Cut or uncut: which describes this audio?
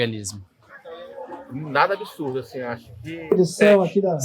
cut